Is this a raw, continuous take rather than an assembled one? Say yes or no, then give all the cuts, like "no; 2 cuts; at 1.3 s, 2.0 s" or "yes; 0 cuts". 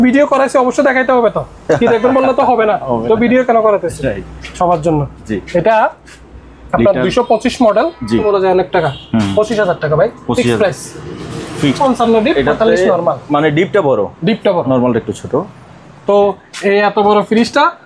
no; 2 cuts; at 8.2 s, 11.8 s